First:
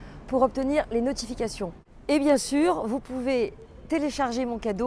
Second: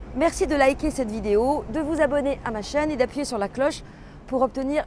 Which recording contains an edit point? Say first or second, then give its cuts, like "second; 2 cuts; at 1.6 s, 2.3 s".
first; 1 cut; at 1.9 s